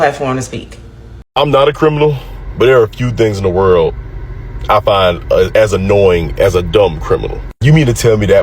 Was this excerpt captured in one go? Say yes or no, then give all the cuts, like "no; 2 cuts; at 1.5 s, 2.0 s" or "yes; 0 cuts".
no; 1 cut; at 1.2 s